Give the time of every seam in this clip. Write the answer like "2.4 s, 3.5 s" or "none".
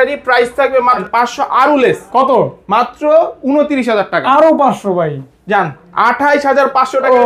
1.1 s